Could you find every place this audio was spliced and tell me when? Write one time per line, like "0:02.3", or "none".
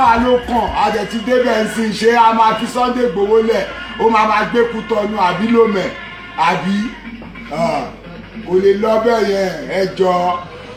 none